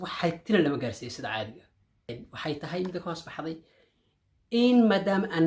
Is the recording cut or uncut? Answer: cut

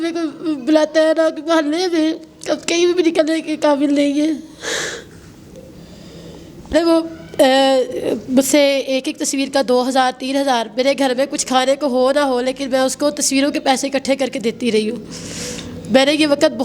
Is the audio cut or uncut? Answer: cut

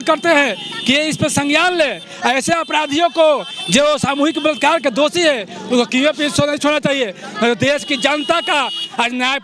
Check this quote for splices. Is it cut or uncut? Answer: uncut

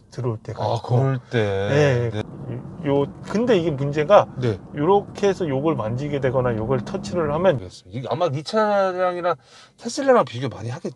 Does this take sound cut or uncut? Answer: cut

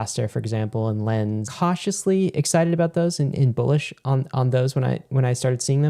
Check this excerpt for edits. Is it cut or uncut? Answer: cut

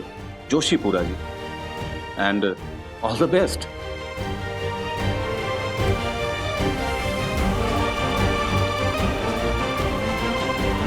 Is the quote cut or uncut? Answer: uncut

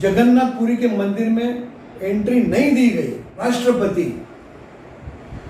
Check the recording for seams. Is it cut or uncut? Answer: cut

